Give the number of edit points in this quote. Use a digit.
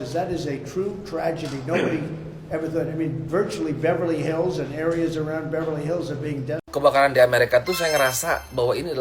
1